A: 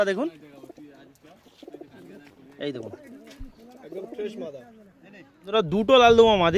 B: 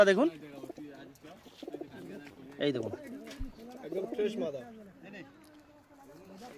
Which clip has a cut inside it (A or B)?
A